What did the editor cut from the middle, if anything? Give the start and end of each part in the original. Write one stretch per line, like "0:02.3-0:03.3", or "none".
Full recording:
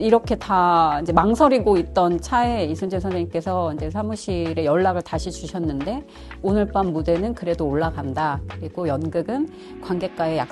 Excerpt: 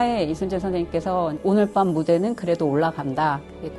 0:03.8-0:06.3